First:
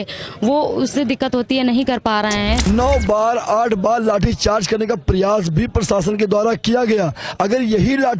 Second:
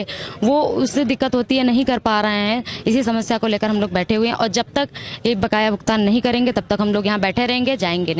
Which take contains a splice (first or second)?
first